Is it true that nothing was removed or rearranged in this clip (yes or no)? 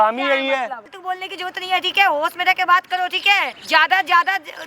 no